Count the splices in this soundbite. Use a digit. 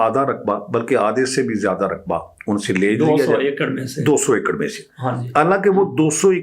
0